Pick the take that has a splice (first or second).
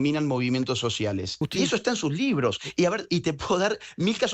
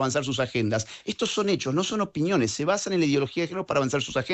first